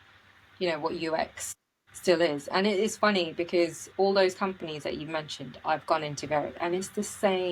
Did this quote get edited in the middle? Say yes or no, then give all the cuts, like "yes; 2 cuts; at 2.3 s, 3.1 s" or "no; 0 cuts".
no; 0 cuts